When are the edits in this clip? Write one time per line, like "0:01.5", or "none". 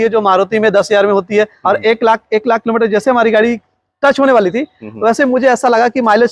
0:01.6

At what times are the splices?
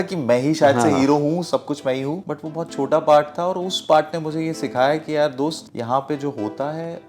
0:02.2
0:05.6

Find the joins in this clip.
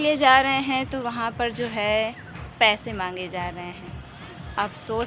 none

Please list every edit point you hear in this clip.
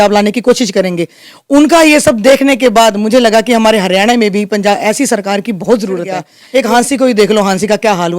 0:06.4

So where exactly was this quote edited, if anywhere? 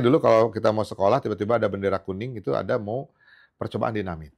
none

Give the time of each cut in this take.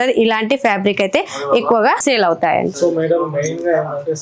none

